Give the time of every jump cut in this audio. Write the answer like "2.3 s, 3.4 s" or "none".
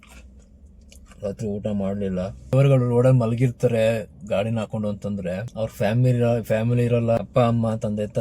2.5 s, 5.5 s, 7.2 s